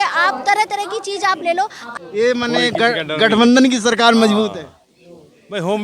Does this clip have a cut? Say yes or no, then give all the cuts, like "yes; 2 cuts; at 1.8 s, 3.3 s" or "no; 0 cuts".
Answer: yes; 1 cut; at 1.8 s